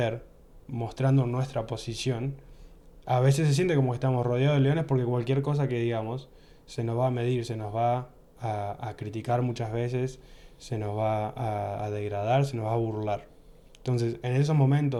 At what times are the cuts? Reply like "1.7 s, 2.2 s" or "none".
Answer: none